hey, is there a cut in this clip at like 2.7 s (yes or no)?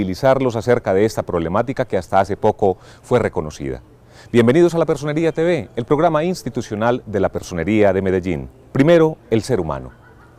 no